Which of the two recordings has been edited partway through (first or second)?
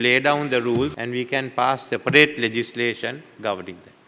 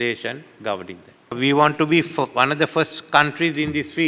first